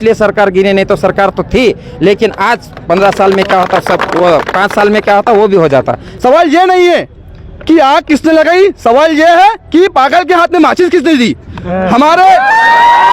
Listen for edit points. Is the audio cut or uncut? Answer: cut